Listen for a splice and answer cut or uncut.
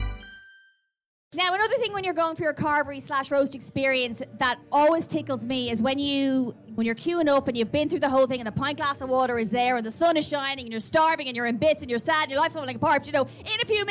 cut